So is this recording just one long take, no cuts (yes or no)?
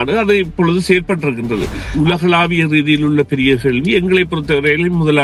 no